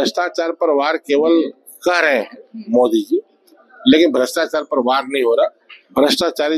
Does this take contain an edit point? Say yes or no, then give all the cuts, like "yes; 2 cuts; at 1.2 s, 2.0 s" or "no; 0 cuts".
no; 0 cuts